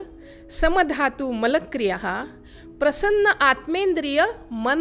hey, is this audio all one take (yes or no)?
yes